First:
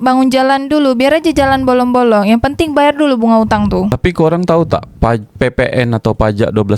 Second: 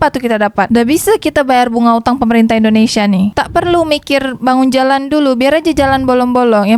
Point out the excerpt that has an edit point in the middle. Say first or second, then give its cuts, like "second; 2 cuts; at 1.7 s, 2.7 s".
first; 1 cut; at 3.9 s